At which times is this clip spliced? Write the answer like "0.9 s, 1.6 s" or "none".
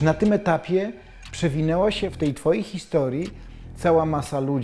2.1 s